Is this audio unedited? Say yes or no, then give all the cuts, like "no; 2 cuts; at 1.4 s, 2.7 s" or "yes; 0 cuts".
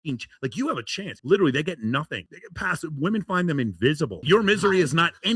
no; 2 cuts; at 1.2 s, 4.2 s